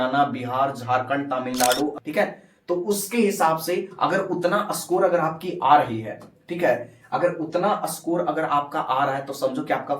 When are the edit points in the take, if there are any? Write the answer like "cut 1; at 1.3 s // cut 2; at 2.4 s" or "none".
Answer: cut 1; at 2.0 s